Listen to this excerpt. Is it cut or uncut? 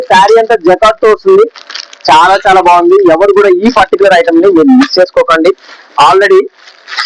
uncut